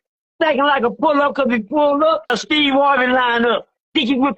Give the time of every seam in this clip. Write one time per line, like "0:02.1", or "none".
0:02.3